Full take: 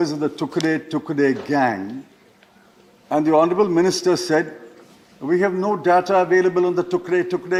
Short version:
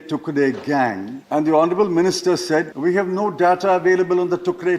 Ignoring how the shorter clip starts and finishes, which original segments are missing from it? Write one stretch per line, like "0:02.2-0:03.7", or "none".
0:01.9-0:02.9
0:04.5-0:05.2